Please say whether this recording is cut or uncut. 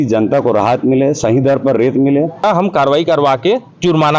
cut